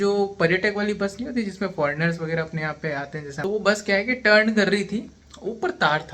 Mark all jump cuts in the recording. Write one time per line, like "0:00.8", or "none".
0:03.2